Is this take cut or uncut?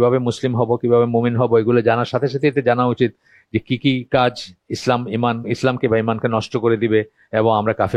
uncut